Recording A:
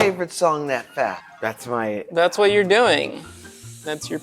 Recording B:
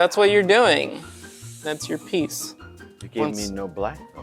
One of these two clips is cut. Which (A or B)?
A